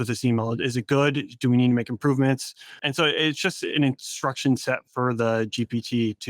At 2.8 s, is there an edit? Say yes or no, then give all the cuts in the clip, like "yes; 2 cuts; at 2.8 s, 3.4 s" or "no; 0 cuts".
yes; 1 cut; at 2.8 s